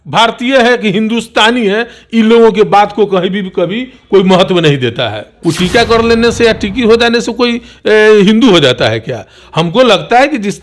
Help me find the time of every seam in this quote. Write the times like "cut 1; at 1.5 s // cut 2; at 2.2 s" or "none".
cut 1; at 5.3 s